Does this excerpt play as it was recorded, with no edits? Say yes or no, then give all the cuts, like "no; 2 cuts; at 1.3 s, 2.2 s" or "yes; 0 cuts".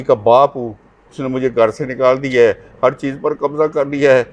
yes; 0 cuts